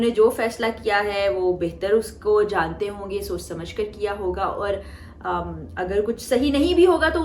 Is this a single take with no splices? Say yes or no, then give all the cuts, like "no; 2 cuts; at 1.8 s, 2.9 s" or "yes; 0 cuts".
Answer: yes; 0 cuts